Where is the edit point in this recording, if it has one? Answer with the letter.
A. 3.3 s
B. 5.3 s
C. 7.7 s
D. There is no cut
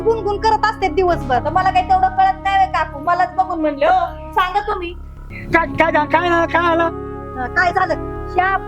B